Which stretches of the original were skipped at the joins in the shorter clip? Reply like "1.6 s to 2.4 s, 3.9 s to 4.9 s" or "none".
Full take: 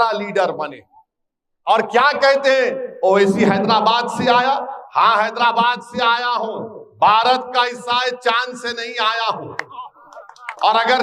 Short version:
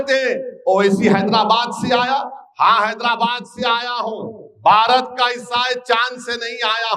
none

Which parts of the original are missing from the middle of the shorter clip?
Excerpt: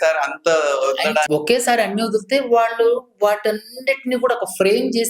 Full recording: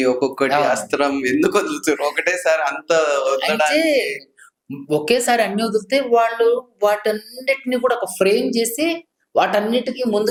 3.7 s to 4.9 s

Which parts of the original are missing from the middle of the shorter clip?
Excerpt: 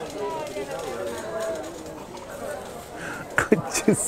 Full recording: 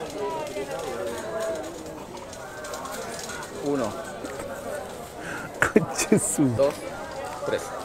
2.3 s to 4.6 s

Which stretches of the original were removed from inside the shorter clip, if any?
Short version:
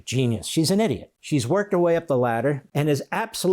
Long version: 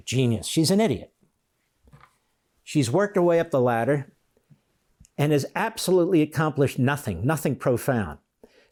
1.1 s to 2.6 s, 4.1 s to 5.1 s

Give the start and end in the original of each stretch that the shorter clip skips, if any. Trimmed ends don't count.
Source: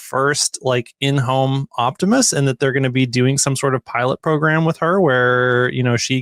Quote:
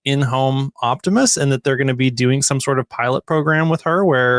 none

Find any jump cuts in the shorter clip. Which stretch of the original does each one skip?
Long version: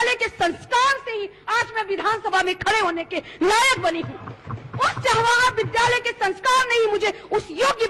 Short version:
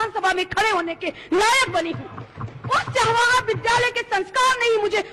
none

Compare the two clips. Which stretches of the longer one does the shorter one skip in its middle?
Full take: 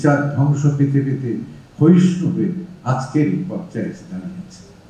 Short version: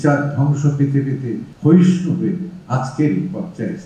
1.5 s to 1.6 s

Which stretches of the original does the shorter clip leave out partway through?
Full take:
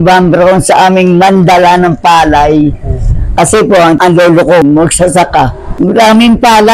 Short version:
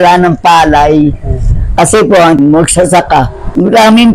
4.0 s to 4.6 s

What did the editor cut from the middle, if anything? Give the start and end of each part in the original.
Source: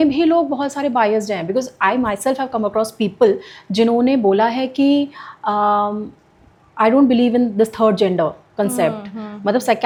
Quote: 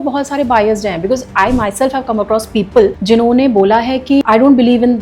3.4 s to 3.7 s, 4.9 s to 6.7 s

